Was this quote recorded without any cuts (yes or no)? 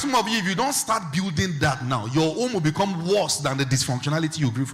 yes